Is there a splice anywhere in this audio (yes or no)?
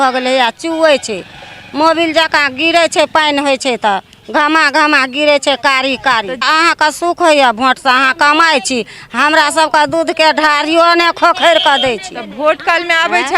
yes